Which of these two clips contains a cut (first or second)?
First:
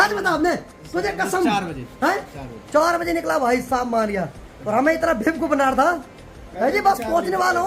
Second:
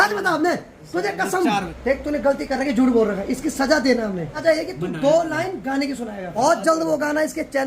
second